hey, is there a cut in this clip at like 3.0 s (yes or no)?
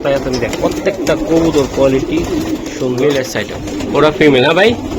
yes